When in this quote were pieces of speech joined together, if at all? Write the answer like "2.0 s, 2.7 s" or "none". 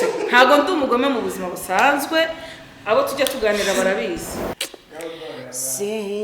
4.7 s